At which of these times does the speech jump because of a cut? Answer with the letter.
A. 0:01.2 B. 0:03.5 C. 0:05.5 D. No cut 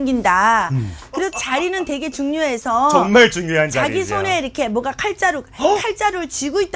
A